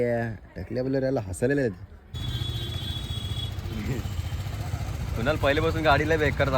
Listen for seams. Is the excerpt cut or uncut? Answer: cut